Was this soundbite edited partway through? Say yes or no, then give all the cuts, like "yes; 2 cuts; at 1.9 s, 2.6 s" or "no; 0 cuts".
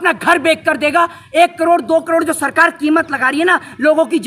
no; 0 cuts